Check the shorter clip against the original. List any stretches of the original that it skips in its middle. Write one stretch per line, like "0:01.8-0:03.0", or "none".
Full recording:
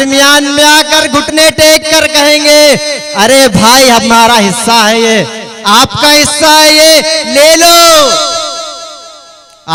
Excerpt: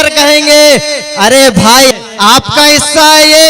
0:03.9-0:05.4